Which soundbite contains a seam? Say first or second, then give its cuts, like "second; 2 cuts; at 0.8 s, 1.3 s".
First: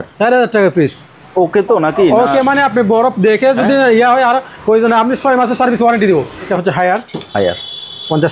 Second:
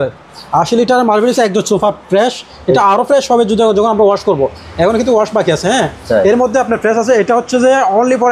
first; 1 cut; at 6.5 s